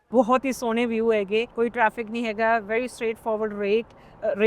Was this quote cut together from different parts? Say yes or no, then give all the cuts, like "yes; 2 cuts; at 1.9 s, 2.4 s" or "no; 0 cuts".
yes; 1 cut; at 1.5 s